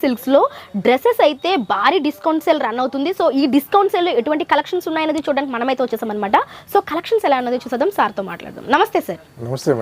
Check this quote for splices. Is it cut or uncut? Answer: uncut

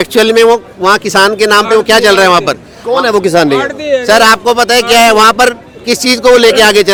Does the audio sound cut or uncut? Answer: uncut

